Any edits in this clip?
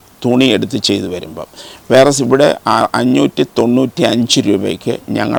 no; 0 cuts

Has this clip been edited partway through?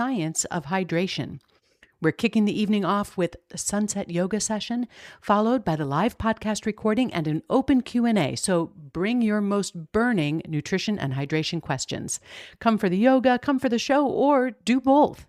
no; 0 cuts

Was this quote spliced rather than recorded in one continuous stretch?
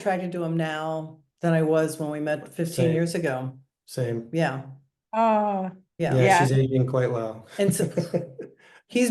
no; 0 cuts

